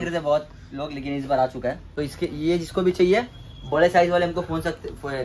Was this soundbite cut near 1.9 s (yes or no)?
yes